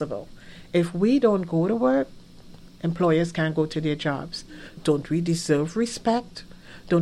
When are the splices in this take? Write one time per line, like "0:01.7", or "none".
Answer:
0:04.8